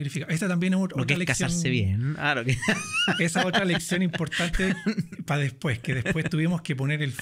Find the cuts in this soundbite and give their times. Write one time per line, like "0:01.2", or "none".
none